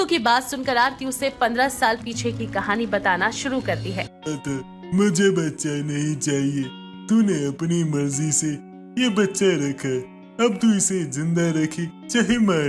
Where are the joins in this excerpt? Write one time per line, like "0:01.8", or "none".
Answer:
0:04.1